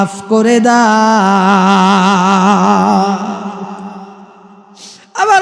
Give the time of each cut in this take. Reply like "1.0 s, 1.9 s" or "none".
none